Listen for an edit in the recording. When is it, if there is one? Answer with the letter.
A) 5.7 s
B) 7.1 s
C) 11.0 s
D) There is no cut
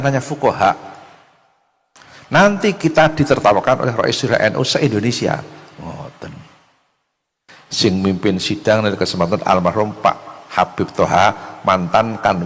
D